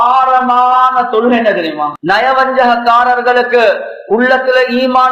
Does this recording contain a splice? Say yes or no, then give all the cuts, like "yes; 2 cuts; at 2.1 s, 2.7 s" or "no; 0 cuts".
yes; 1 cut; at 2.0 s